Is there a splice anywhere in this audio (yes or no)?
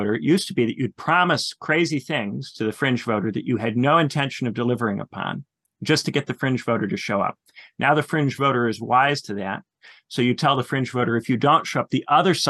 no